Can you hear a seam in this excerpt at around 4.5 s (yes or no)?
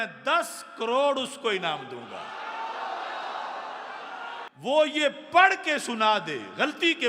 yes